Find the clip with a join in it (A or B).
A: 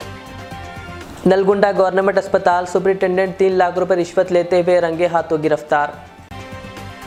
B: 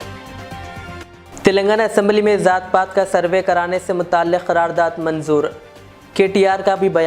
B